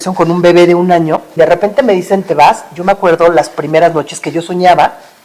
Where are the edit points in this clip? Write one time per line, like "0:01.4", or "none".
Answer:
0:01.3